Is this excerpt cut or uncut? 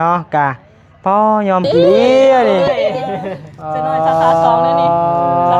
cut